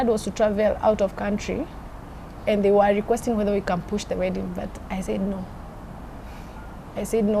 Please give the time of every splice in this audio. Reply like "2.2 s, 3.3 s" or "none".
none